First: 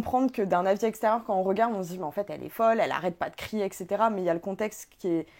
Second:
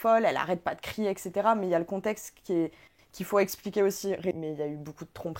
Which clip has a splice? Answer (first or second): second